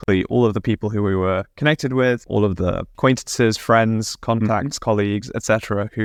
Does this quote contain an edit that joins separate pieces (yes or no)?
no